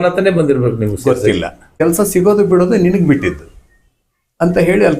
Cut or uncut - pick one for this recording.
cut